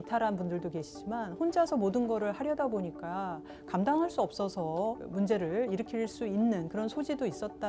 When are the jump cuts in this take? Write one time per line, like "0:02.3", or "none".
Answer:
0:05.0